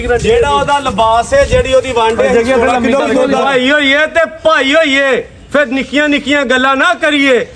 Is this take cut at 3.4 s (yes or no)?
yes